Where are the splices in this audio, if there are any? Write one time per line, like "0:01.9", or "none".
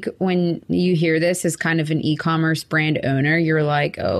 none